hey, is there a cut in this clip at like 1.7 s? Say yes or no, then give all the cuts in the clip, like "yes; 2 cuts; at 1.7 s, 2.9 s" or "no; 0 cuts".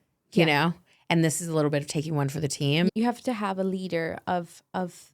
no; 1 cut; at 2.9 s